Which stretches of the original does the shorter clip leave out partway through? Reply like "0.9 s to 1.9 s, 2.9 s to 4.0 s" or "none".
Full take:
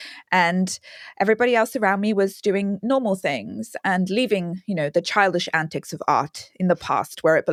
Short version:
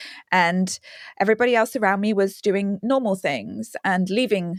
none